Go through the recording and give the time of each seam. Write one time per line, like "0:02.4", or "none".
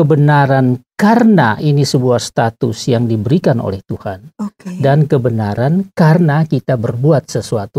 none